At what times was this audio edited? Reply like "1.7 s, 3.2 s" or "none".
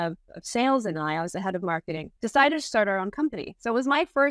2.1 s